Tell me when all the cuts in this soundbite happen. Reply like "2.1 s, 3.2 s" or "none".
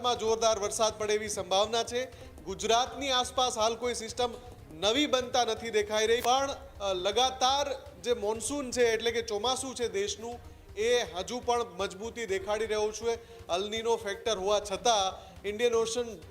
6.2 s

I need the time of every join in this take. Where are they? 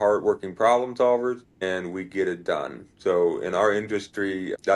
1.5 s

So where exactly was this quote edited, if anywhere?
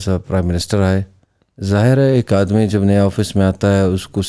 none

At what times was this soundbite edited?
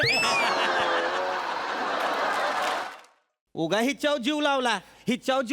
2.9 s

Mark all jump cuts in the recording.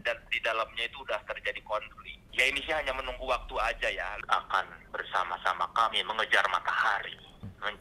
4.1 s

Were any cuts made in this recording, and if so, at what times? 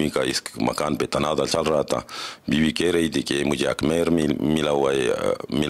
none

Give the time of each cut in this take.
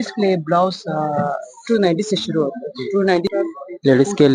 3.3 s

